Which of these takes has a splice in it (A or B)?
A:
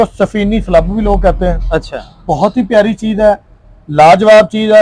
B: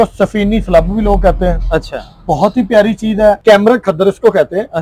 B